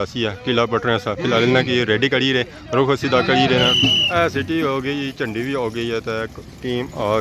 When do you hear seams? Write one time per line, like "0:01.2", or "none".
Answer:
0:03.7